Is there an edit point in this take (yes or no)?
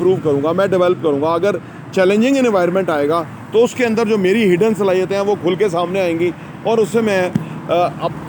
no